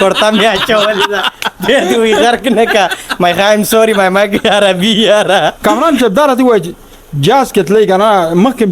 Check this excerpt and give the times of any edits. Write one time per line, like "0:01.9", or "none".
0:05.5

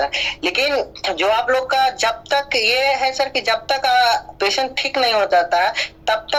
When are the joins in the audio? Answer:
none

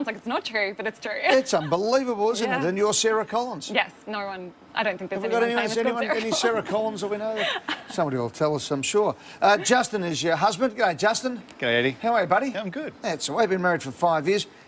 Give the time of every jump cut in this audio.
0:05.0

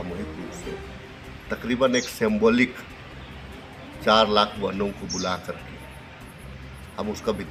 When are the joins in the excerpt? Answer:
none

